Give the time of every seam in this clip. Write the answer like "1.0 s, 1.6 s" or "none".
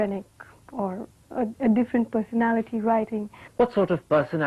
none